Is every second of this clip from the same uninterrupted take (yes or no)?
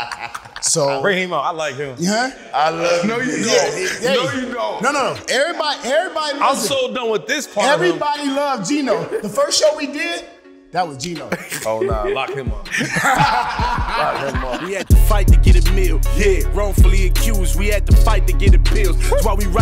no